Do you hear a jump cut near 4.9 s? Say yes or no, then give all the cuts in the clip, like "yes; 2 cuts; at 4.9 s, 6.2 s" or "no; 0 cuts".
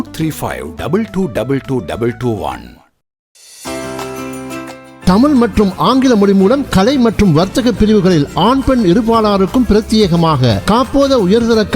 no; 1 cut; at 3.2 s